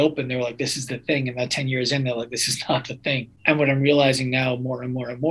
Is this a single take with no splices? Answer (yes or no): no